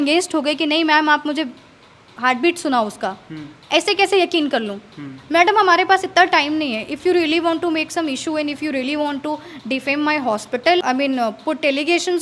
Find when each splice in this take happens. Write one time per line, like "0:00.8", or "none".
0:10.8